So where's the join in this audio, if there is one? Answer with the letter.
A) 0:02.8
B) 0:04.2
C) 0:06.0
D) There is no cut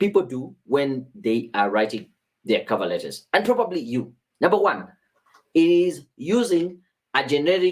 B